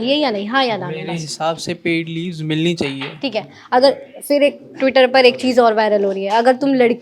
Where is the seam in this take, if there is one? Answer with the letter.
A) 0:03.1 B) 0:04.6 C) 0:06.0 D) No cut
D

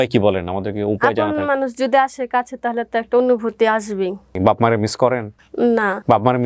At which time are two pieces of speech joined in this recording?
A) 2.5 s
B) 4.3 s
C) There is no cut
B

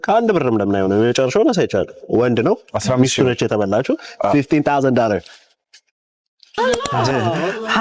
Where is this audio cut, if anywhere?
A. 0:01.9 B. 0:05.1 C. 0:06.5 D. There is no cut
C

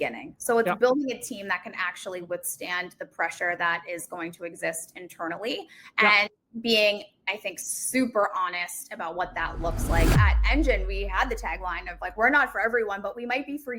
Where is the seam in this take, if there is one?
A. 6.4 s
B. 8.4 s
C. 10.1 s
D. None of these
C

